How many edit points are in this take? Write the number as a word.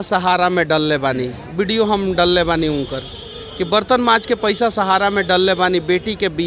zero